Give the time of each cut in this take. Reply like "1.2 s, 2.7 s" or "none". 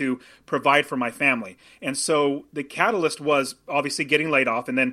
none